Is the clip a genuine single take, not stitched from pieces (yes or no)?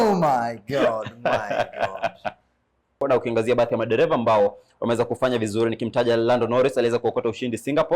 no